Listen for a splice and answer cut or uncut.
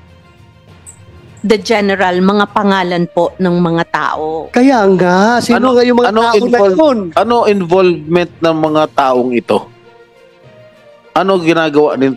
cut